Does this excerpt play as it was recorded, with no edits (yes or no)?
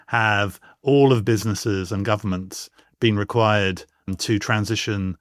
yes